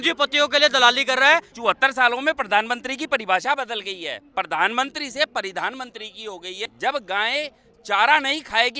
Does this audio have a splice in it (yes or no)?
yes